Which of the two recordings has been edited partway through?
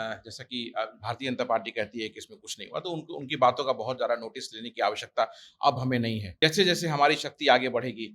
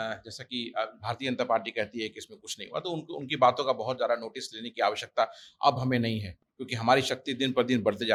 first; 1 cut; at 6.2 s

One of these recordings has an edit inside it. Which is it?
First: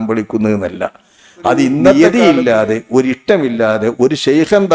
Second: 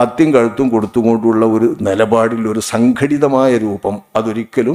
first; 1 cut; at 1.9 s

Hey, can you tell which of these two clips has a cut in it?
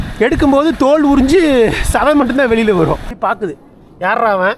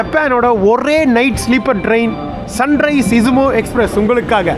first; 1 cut; at 3.1 s

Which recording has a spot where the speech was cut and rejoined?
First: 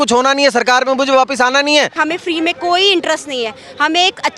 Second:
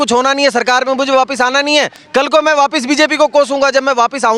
first; 1 cut; at 2.0 s

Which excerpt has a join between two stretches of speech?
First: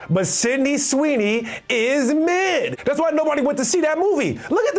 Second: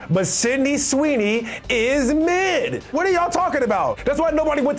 first; 1 cut; at 2.8 s

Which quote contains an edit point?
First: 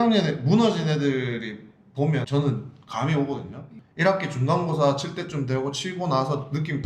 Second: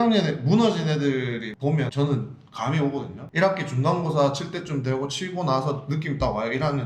second; 2 cuts; at 1.5 s, 3.2 s

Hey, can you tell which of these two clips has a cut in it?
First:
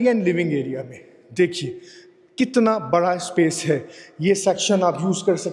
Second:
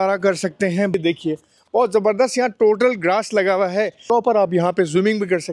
second; 2 cuts; at 0.9 s, 4.0 s

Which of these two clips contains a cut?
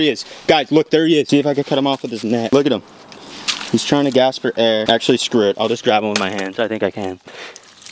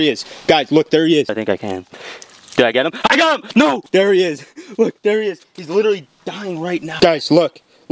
second; 3 cuts; at 1.3 s, 3.8 s, 7.0 s

